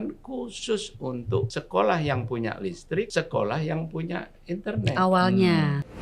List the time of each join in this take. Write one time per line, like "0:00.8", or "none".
0:01.6
0:03.1